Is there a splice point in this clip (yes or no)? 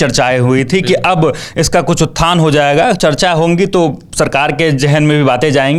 no